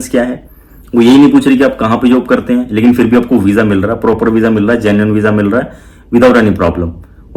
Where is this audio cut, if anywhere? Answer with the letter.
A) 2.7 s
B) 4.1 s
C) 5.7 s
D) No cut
D